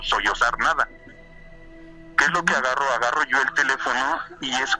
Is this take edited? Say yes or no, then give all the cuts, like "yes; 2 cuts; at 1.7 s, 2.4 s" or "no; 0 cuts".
no; 0 cuts